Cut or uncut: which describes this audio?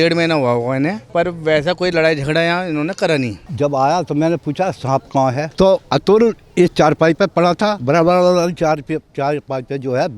cut